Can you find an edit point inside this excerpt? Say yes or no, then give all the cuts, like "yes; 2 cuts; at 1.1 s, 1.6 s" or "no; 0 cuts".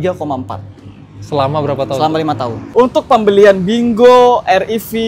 yes; 1 cut; at 2.6 s